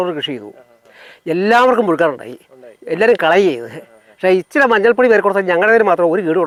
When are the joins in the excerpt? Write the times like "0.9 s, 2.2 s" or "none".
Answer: none